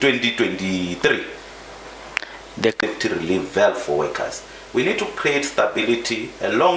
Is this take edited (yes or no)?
yes